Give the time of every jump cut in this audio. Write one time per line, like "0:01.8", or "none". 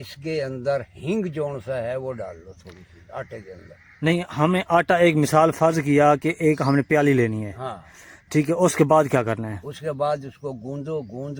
none